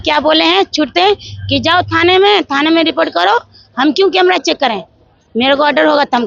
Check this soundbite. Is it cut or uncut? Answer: uncut